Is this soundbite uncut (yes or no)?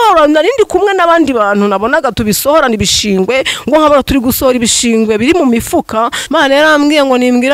no